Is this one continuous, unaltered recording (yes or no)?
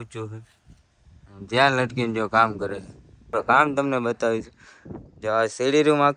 no